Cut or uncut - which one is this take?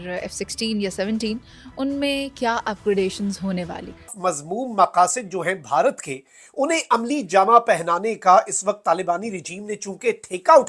cut